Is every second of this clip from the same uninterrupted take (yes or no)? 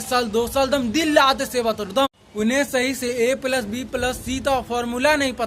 no